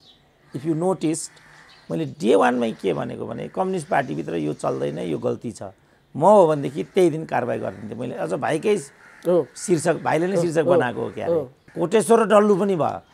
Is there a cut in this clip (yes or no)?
yes